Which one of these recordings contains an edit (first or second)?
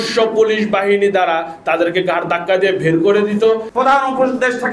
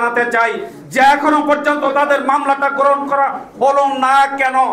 first